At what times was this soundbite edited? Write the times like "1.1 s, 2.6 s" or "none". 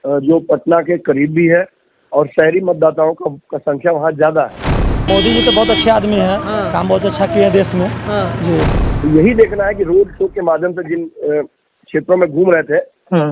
4.8 s, 8.8 s